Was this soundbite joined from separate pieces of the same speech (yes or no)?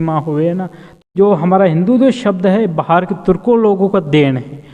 yes